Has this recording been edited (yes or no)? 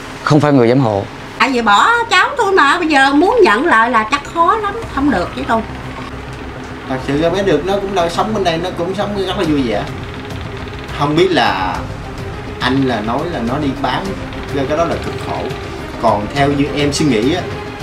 yes